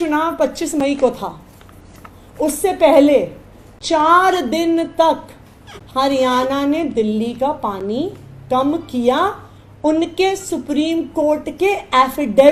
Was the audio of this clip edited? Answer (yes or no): no